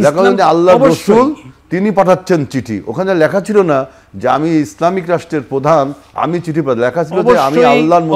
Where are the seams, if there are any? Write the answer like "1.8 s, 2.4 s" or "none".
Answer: none